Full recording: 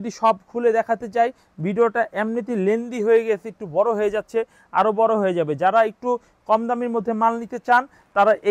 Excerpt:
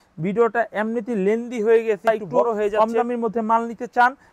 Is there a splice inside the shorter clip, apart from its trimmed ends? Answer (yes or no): yes